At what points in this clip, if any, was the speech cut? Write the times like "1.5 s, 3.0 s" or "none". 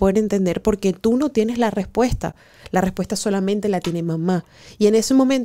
none